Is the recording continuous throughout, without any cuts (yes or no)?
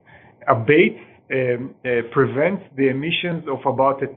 yes